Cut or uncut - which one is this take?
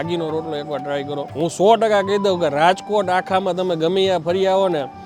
cut